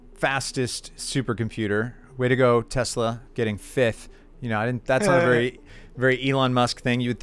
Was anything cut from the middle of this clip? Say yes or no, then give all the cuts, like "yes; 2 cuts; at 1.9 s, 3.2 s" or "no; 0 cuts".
no; 0 cuts